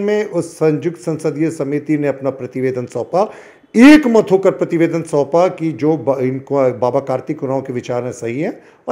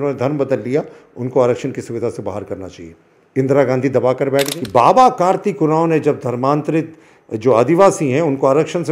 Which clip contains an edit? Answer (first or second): second